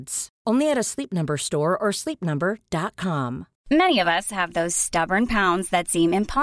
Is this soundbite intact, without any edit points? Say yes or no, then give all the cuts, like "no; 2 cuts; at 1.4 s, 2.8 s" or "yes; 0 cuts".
no; 1 cut; at 3.5 s